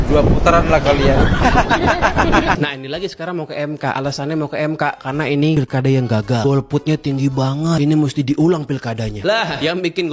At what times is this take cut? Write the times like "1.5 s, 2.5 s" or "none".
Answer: 2.6 s